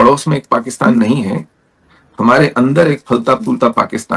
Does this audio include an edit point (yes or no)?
no